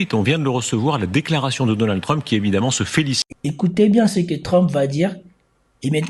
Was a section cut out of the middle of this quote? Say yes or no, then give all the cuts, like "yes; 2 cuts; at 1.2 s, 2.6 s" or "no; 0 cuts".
yes; 1 cut; at 3.2 s